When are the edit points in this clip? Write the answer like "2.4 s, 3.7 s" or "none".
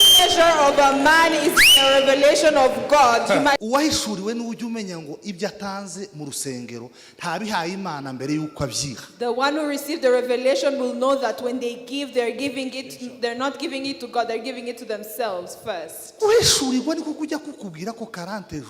3.6 s